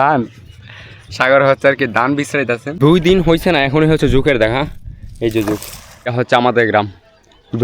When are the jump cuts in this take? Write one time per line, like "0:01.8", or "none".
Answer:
0:02.7
0:06.1